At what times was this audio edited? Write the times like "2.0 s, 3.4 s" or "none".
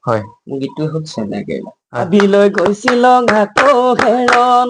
2.1 s